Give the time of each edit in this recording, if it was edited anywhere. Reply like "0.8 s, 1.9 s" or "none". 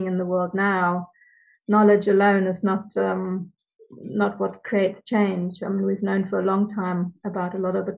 none

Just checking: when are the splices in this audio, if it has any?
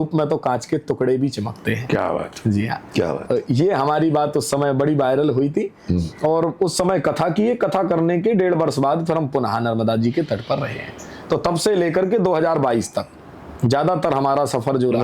none

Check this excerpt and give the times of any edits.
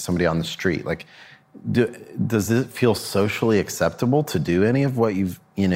none

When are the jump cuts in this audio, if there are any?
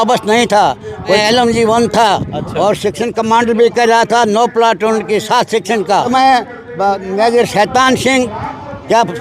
1.2 s, 6.1 s

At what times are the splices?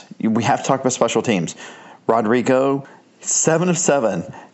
2.9 s

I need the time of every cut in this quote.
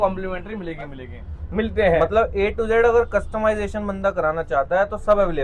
1.0 s

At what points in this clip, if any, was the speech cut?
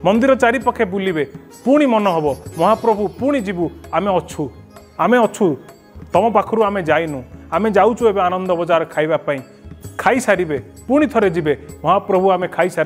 none

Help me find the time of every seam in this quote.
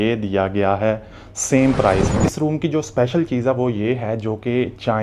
2.1 s

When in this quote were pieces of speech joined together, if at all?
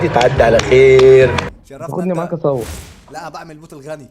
1.7 s

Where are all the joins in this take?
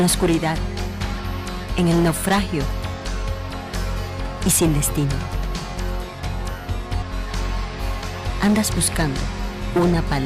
none

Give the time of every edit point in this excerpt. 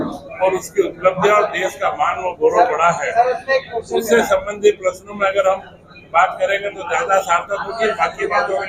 none

